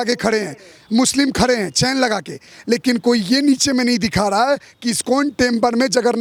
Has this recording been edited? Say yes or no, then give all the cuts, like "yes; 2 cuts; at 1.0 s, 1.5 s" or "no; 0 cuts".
no; 0 cuts